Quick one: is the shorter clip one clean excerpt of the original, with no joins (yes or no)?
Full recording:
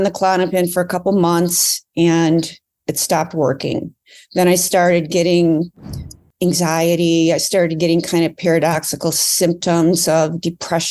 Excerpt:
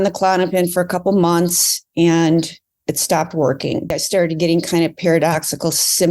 no